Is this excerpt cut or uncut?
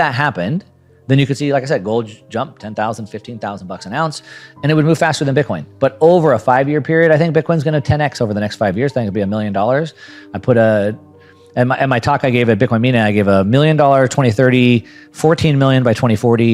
uncut